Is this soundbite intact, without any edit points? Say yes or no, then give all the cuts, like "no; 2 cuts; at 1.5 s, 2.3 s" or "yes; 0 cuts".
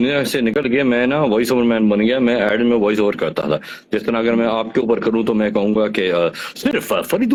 yes; 0 cuts